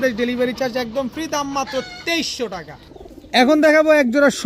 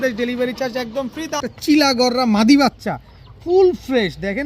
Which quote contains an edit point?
second; 1 cut; at 1.5 s

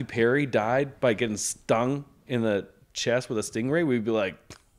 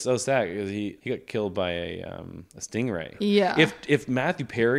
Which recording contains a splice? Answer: second; 2 cuts; at 1.0 s, 3.1 s

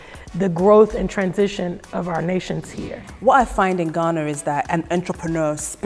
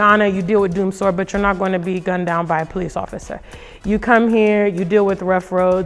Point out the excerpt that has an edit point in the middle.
first; 1 cut; at 3.1 s

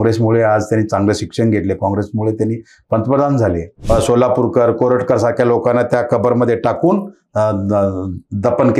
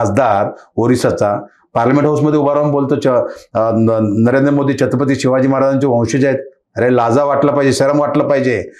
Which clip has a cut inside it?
first; 1 cut; at 3.8 s

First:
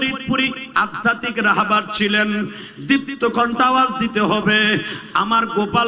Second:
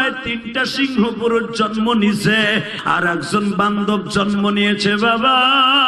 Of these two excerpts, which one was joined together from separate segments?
second; 1 cut; at 2.8 s

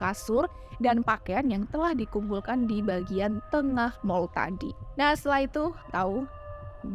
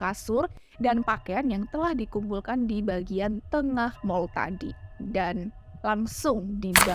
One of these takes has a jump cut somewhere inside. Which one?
second; 1 cut; at 4.8 s

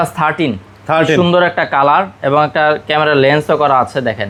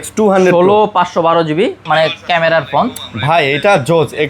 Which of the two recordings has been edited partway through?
second; 1 cut; at 1.8 s

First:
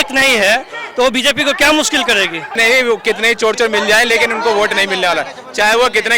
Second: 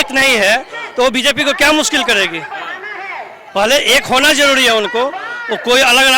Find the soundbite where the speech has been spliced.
first; 1 cut; at 2.6 s

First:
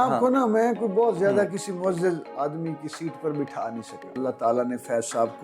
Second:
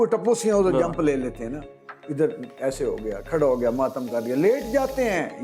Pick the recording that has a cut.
first; 1 cut; at 4.1 s

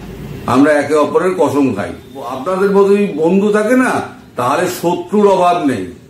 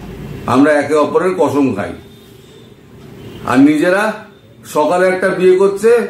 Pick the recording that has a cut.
first; 1 cut; at 2.4 s

